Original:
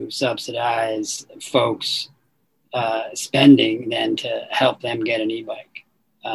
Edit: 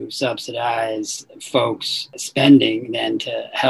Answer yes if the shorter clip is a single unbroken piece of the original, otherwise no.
no